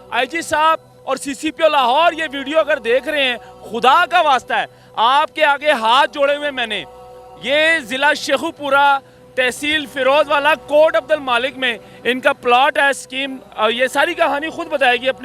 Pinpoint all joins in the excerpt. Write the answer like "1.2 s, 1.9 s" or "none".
none